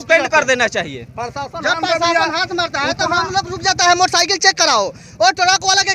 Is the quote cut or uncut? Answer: uncut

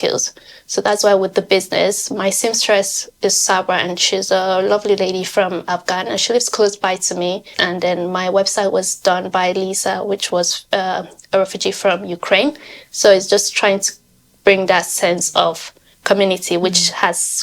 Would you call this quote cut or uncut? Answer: cut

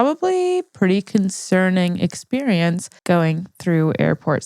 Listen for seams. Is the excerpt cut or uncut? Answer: cut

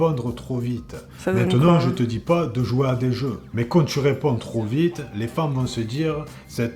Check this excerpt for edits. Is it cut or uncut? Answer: uncut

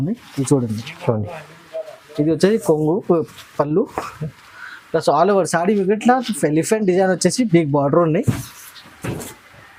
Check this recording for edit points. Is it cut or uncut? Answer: uncut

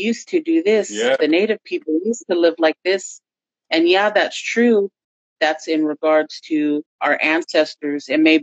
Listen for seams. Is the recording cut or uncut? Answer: cut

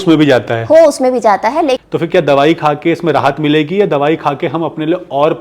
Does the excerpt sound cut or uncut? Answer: cut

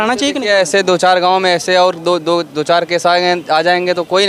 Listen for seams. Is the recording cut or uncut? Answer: uncut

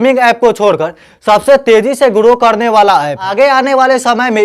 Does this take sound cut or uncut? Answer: cut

